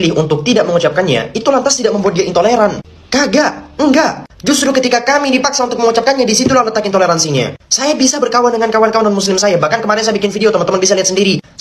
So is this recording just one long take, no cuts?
yes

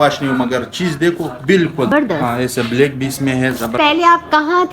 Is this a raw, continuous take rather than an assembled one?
no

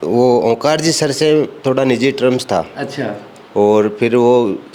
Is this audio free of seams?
yes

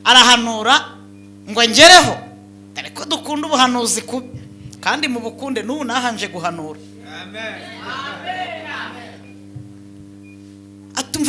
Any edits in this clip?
no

